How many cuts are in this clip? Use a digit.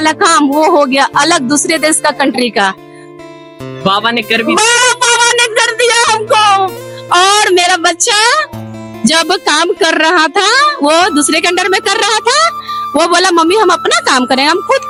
0